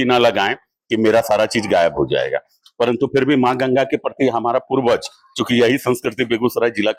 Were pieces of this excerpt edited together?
no; 0 cuts

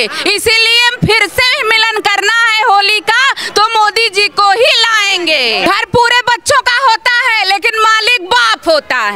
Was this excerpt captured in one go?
no; 1 cut; at 5.7 s

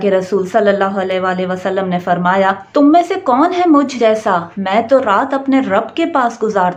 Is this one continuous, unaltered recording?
yes; 0 cuts

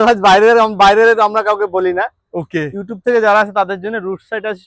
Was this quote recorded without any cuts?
yes; 0 cuts

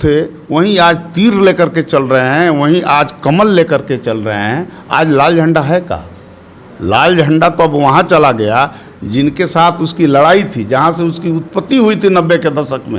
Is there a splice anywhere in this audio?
no; 0 cuts

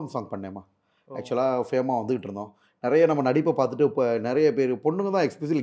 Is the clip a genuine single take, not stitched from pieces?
yes; 0 cuts

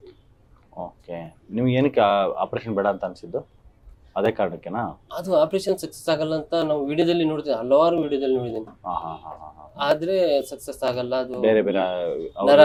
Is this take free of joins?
yes; 0 cuts

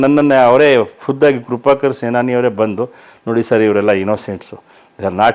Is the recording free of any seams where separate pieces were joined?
yes; 0 cuts

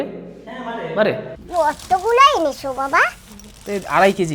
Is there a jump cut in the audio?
yes; 1 cut; at 1.4 s

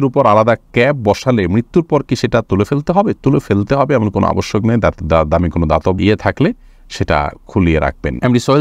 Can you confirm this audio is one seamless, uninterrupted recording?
yes; 0 cuts

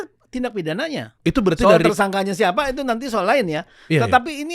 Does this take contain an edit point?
yes; 1 cut; at 1.1 s

